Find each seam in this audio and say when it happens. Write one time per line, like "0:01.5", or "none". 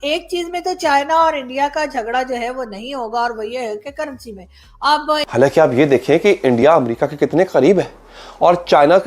0:05.3